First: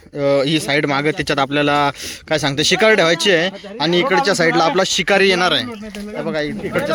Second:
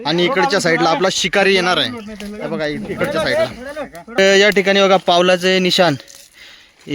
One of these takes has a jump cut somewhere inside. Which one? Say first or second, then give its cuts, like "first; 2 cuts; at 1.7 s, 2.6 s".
second; 1 cut; at 4.2 s